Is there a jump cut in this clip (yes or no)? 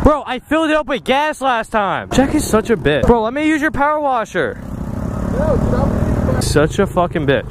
yes